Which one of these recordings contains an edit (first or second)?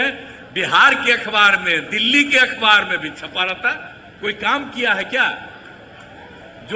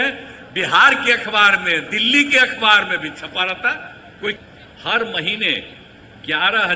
second